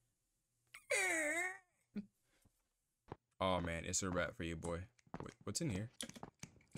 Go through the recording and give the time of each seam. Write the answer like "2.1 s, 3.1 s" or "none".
3.1 s

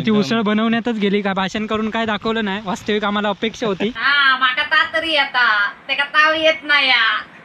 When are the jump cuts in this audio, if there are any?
none

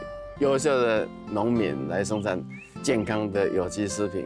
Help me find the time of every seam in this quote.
1.8 s

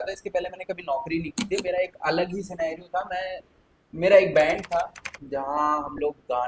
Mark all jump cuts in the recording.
none

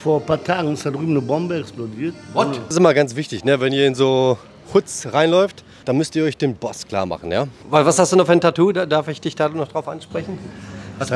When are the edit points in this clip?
2.7 s, 5.7 s, 7.6 s

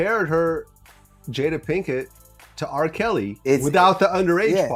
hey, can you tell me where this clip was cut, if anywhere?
none

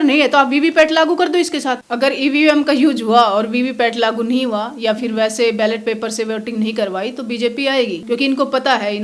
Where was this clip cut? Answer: 1.8 s, 8.0 s

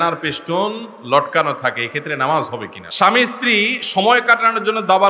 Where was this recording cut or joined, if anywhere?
2.8 s

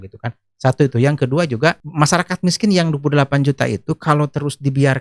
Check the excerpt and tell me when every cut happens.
1.9 s

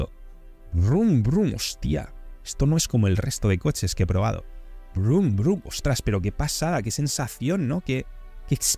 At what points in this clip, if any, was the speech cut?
none

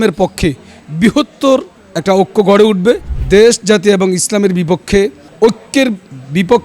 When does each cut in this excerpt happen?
3.1 s, 5.2 s

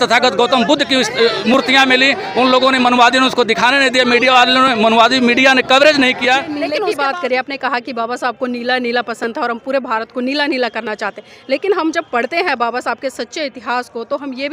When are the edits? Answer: 6.6 s

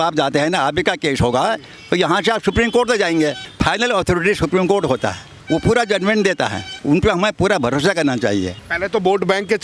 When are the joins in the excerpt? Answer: 3.5 s, 5.3 s, 6.7 s, 8.5 s

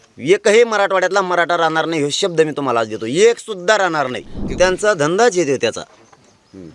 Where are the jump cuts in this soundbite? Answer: 4.4 s

